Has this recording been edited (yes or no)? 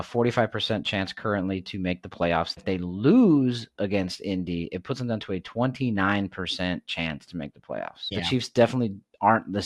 yes